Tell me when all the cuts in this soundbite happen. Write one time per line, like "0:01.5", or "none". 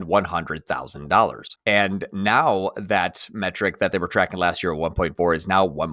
0:01.5

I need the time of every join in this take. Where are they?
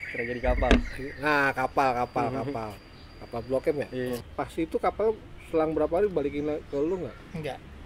0:04.3

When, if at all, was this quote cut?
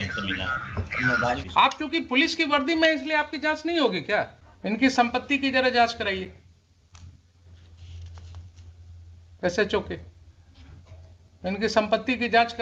0:01.4
0:04.4

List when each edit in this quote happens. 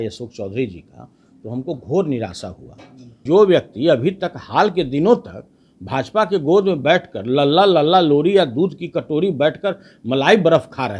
0:03.2

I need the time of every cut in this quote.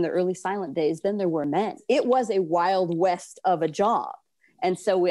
0:01.8

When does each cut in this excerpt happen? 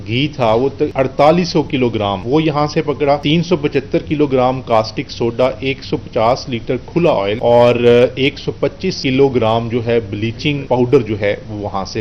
0:00.9
0:02.2
0:03.2
0:07.4
0:08.9
0:10.6

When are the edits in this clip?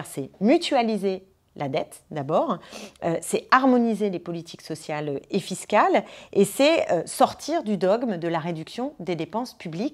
none

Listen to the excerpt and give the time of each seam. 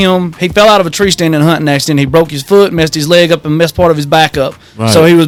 none

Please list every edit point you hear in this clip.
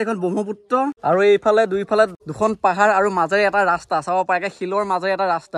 0:01.0
0:02.2

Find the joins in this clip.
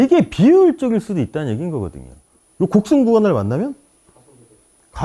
0:02.3

